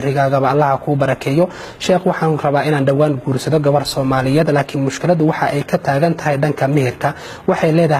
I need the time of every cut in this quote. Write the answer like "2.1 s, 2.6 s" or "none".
none